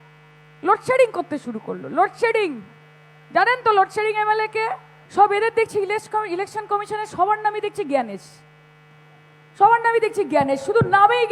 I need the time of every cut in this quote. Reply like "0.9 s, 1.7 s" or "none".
4.9 s

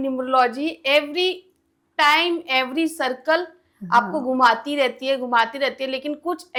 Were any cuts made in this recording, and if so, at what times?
none

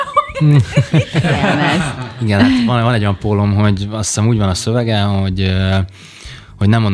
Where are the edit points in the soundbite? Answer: 1.2 s

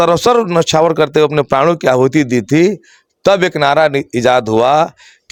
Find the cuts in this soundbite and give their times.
none

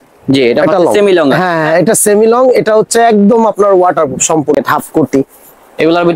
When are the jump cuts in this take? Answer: 4.6 s

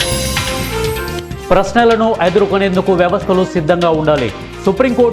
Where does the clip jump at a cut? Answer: 1.2 s

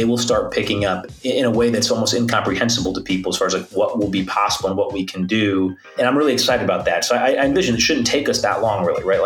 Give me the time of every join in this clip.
1.1 s, 5.9 s

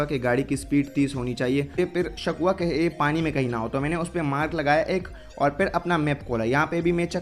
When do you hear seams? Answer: 1.8 s

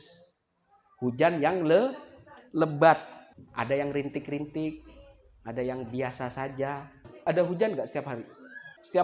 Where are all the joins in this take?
7.1 s

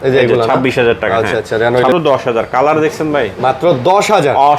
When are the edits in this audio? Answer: 1.9 s

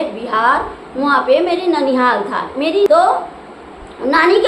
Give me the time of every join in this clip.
2.9 s

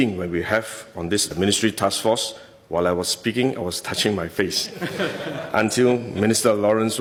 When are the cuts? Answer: none

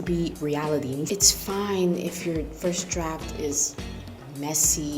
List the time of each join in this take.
1.1 s

